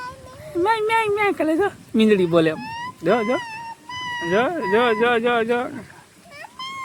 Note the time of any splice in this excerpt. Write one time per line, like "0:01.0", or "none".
none